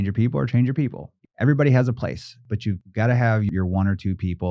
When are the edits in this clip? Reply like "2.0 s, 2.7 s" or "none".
1.2 s, 2.4 s, 3.5 s